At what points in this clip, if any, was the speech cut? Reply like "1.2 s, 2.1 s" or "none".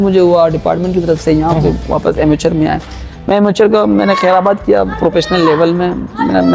none